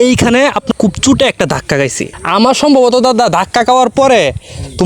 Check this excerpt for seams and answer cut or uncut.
cut